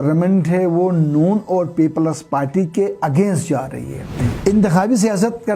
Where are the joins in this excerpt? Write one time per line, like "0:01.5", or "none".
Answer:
0:04.2